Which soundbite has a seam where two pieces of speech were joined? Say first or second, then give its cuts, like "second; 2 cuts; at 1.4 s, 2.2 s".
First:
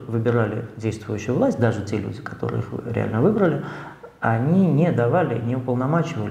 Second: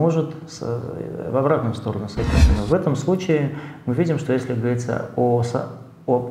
second; 1 cut; at 2.5 s